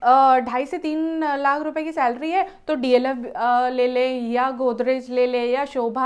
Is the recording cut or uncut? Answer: uncut